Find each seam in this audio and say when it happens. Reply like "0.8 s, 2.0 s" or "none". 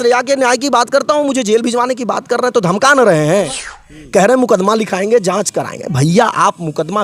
3.6 s